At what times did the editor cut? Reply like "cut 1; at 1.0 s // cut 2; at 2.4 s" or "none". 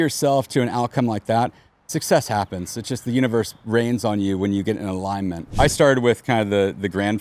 cut 1; at 5.4 s